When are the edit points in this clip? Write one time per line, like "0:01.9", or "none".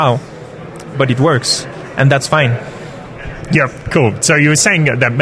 none